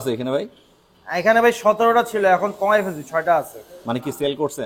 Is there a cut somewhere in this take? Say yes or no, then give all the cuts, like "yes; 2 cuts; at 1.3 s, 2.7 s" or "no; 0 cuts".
no; 0 cuts